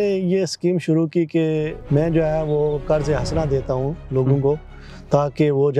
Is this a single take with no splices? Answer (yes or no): no